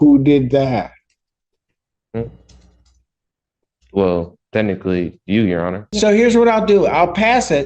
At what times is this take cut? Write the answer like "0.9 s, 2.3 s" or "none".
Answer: 5.9 s